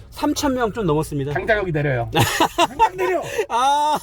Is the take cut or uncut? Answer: uncut